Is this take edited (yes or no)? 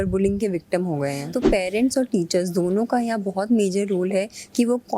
yes